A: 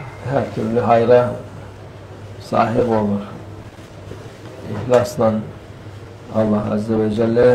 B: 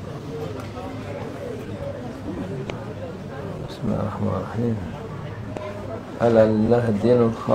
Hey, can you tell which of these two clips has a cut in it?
A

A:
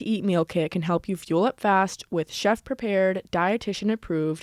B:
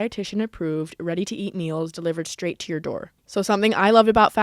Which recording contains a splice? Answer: B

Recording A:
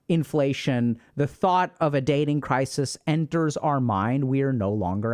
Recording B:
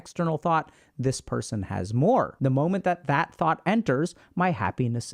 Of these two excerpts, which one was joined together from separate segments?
B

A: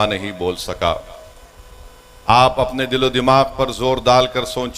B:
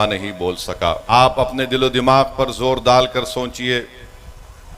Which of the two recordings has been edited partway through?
B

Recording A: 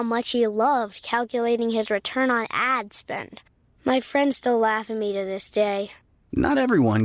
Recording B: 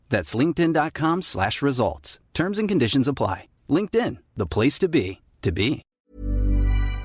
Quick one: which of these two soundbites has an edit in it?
B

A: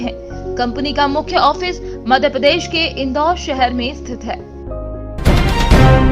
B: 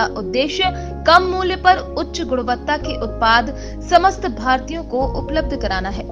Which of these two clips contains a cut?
A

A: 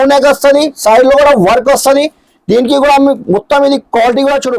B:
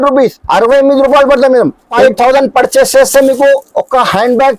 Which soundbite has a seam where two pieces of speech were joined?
B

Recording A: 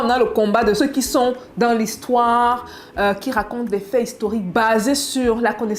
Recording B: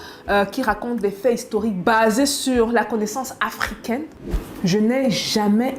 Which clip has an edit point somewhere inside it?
B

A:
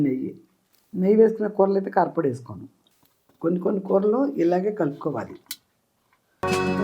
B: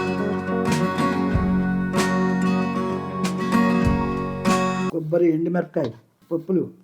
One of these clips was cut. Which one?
A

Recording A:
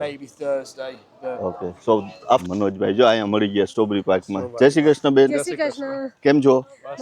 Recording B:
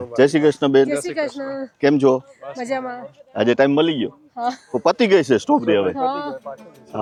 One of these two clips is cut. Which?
A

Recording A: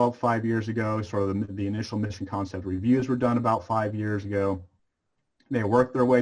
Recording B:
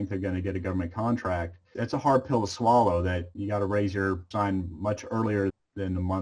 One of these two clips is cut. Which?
B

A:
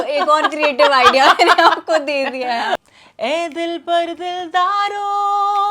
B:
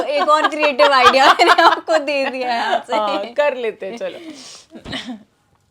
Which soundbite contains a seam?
A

